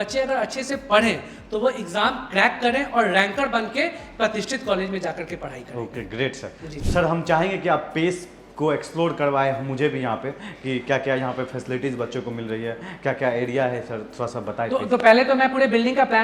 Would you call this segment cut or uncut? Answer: uncut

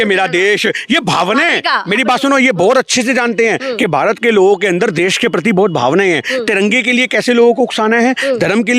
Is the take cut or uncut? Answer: uncut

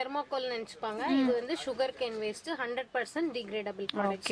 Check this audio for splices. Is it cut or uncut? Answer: uncut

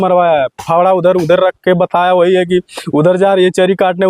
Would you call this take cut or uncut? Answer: uncut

